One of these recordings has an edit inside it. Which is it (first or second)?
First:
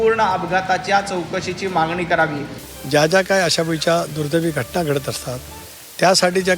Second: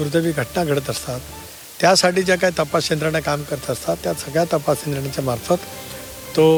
first